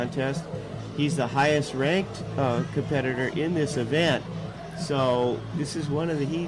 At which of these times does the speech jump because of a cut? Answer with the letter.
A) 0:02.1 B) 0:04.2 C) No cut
B